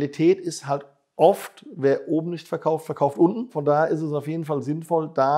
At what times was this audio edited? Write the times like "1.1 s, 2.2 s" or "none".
3.6 s